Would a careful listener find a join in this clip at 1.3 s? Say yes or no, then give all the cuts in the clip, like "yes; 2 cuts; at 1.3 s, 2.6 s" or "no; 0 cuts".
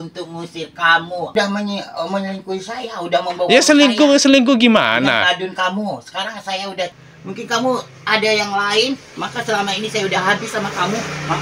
yes; 2 cuts; at 1.3 s, 7.0 s